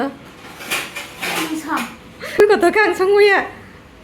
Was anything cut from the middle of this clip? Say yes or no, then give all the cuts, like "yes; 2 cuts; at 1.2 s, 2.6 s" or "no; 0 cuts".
yes; 1 cut; at 2.4 s